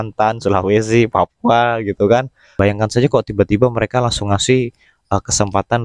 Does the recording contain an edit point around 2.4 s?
yes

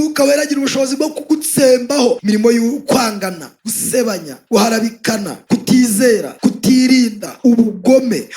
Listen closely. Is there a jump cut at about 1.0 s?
no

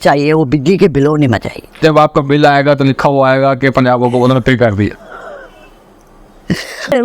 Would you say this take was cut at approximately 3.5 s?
no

